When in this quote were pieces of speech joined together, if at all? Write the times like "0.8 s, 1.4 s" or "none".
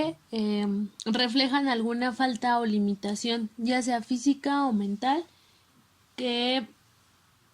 0.9 s